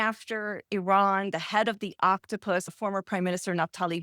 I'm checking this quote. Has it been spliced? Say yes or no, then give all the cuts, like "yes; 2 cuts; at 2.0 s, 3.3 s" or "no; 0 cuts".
yes; 1 cut; at 2.7 s